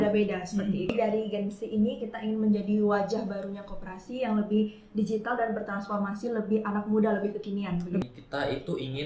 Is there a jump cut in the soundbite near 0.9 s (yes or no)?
yes